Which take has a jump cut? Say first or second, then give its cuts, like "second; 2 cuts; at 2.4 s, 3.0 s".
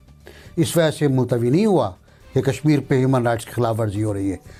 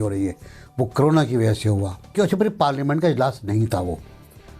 second; 1 cut; at 2.1 s